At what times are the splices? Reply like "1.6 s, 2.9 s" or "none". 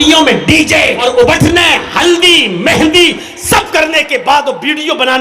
1.0 s